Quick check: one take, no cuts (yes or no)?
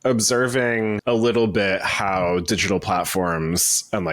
no